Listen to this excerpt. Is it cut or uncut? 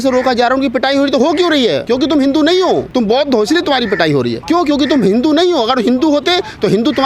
cut